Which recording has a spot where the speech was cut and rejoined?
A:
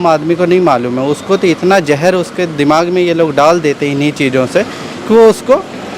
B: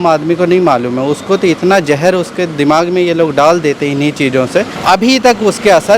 B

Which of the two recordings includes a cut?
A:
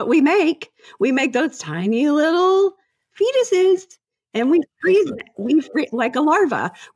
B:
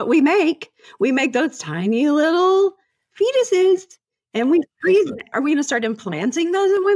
B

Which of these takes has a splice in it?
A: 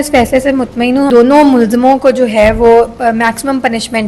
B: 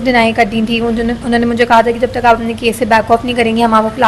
A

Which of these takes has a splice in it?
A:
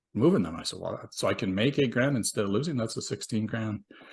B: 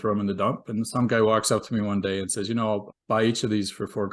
B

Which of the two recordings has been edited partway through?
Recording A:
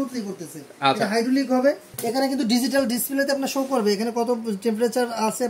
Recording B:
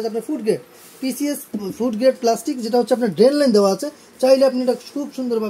A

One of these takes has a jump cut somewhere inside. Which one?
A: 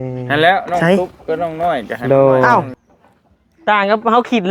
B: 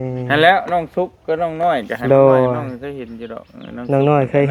A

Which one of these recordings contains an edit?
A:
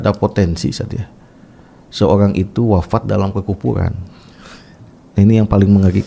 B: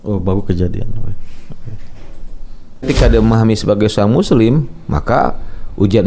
B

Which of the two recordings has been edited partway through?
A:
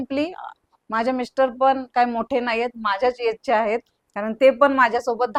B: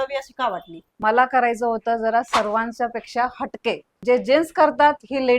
B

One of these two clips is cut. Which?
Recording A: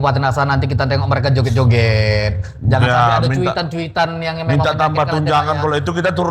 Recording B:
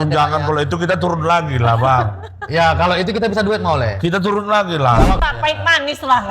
B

